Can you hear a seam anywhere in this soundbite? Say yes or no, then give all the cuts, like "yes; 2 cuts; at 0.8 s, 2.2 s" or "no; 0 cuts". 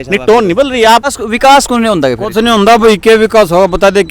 yes; 1 cut; at 1.0 s